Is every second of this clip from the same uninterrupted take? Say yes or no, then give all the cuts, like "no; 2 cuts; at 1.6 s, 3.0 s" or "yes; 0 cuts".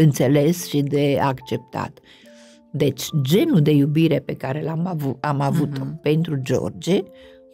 yes; 0 cuts